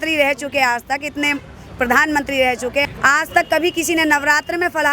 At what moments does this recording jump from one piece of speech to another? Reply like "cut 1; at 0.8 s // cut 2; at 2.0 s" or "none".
cut 1; at 2.8 s